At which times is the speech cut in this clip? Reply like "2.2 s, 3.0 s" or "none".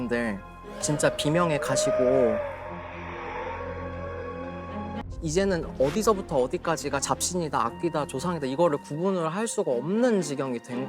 5.0 s

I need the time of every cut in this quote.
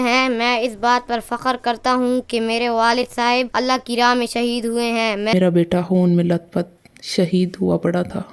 5.3 s

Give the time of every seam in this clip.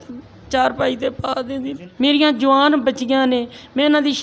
1.8 s

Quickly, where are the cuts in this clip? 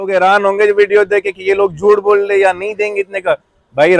none

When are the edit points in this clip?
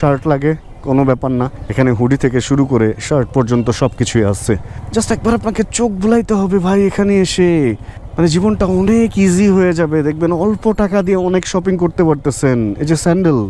none

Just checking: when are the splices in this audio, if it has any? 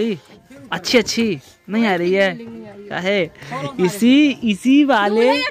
none

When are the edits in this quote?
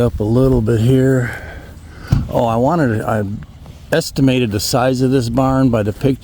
none

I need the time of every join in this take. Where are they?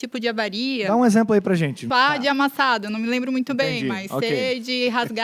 1.8 s

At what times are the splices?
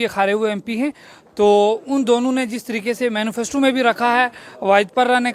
none

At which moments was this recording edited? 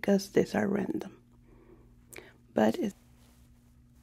2.9 s

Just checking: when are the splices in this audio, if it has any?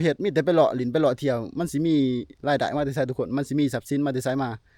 none

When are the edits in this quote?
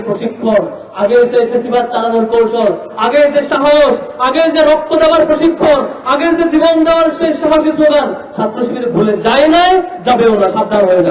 none

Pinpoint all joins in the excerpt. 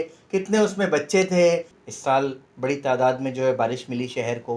1.7 s

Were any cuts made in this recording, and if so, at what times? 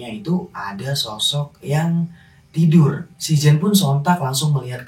3.1 s

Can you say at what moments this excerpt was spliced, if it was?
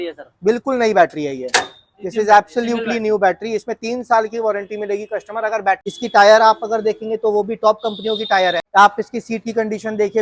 5.9 s, 8.6 s

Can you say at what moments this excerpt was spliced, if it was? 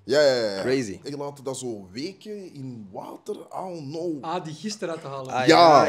1.0 s, 4.2 s

